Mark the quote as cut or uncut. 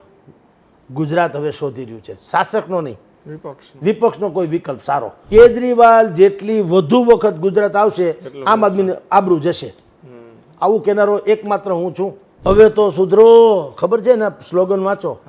cut